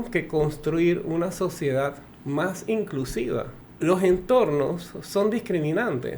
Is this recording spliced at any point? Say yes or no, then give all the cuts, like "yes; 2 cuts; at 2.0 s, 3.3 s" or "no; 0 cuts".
yes; 2 cuts; at 2.1 s, 3.6 s